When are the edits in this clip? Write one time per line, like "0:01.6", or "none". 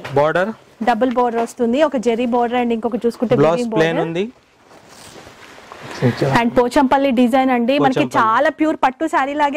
none